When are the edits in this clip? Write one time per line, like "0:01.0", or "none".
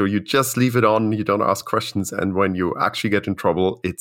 none